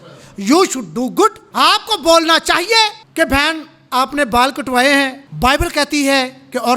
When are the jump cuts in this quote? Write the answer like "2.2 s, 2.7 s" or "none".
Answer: 1.4 s, 3.0 s, 5.2 s